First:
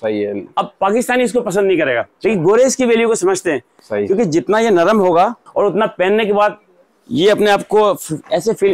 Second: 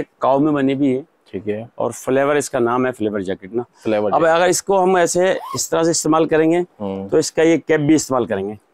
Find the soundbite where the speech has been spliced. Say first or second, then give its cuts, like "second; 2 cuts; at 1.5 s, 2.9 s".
first; 2 cuts; at 2.1 s, 5.4 s